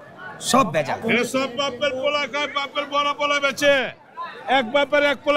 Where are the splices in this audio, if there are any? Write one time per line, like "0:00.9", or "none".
0:01.0